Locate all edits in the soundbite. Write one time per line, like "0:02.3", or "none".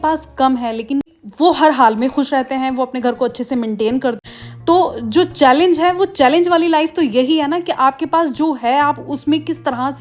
0:01.2
0:04.2